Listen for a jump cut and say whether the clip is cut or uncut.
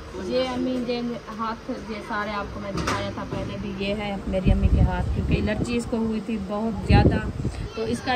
uncut